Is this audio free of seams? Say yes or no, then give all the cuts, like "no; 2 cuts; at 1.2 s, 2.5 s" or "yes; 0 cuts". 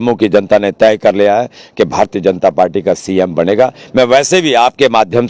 yes; 0 cuts